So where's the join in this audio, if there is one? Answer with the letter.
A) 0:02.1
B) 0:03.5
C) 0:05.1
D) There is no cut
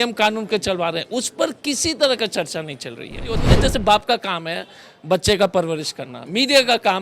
B